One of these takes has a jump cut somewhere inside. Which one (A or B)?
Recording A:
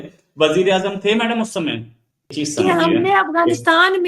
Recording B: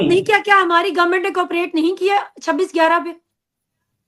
A